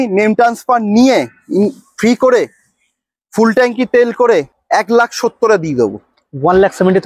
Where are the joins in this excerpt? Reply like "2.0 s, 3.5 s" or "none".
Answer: 4.6 s